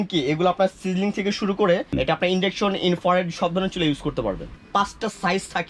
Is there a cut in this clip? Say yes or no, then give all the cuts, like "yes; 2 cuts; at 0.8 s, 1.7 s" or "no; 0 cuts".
yes; 2 cuts; at 1.9 s, 4.5 s